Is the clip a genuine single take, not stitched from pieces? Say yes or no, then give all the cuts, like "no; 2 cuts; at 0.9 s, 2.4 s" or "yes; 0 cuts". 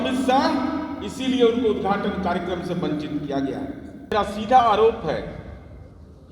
no; 1 cut; at 4.1 s